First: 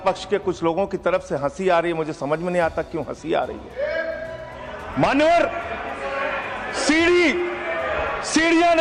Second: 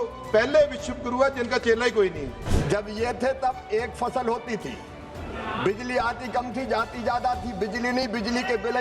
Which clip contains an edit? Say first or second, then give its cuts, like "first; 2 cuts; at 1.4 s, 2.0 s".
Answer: second; 1 cut; at 2.5 s